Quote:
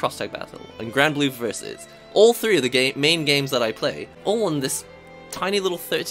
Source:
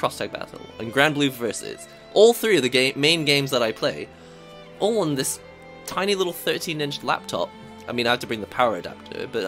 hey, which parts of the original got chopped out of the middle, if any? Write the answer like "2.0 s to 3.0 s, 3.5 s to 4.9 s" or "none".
4.1 s to 4.6 s